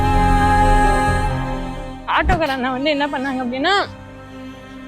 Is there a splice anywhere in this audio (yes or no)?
yes